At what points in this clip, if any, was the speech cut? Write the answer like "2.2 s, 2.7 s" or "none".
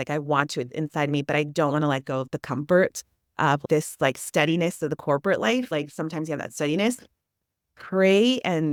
none